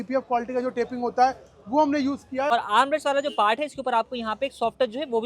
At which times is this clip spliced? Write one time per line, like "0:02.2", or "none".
0:02.5